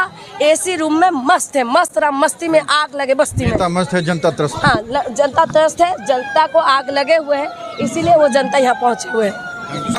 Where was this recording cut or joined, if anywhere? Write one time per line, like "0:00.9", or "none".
none